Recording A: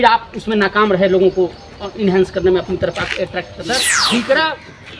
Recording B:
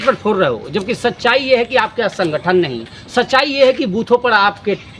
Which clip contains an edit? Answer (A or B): A